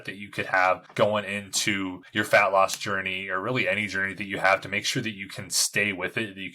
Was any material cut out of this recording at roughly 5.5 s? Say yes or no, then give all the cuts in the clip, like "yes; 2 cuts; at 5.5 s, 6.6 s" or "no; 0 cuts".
no; 2 cuts; at 0.9 s, 2.0 s